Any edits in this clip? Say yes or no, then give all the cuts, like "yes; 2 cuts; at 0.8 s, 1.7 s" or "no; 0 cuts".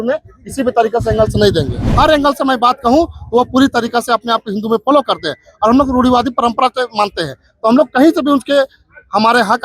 yes; 1 cut; at 1.8 s